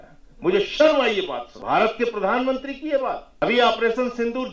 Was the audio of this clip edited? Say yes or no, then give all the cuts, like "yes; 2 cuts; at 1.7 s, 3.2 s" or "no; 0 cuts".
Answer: yes; 2 cuts; at 1.5 s, 3.3 s